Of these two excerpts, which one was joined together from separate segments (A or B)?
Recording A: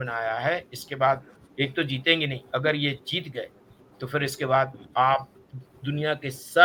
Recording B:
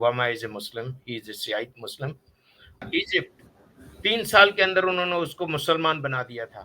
B